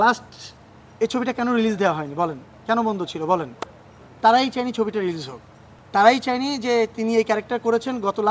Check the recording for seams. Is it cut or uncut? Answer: uncut